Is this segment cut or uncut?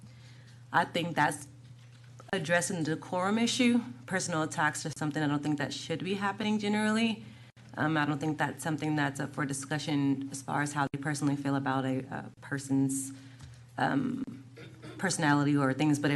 uncut